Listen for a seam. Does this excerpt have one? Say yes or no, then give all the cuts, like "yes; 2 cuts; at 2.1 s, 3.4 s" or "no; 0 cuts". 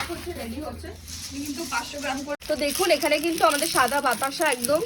yes; 1 cut; at 2.4 s